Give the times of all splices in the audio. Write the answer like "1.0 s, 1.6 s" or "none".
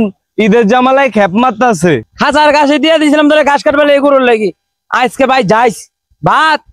2.1 s